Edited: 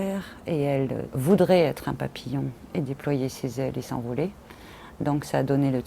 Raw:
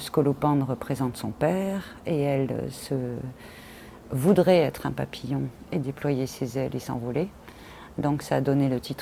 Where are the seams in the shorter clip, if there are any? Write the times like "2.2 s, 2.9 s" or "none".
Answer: 1.1 s